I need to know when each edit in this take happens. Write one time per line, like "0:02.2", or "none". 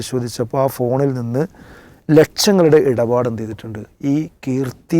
none